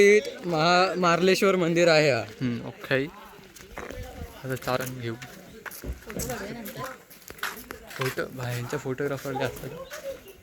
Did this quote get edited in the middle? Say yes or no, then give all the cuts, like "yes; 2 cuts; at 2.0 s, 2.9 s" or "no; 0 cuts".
no; 0 cuts